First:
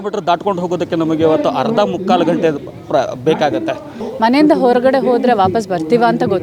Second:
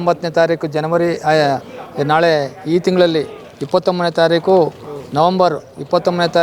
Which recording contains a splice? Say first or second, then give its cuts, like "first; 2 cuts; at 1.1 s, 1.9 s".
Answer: first; 1 cut; at 4.0 s